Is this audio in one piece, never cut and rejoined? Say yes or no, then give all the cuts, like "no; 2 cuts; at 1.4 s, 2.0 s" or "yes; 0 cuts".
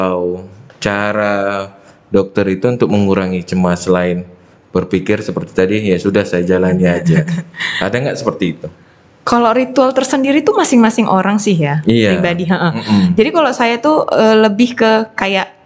yes; 0 cuts